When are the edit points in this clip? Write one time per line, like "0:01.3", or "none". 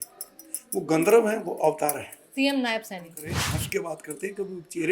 0:02.1
0:03.4